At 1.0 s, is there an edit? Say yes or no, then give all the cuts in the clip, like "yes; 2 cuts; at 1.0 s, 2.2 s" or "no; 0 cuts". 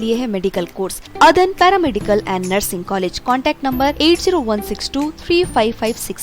yes; 1 cut; at 1.0 s